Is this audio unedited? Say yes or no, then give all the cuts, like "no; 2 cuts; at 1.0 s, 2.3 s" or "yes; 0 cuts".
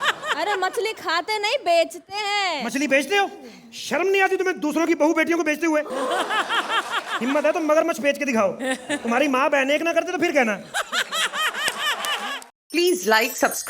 no; 1 cut; at 12.4 s